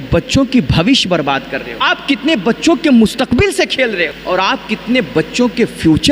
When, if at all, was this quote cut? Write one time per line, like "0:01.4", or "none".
0:01.7
0:04.2